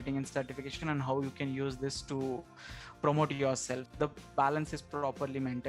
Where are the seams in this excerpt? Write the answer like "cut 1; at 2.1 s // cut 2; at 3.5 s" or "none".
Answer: cut 1; at 3.9 s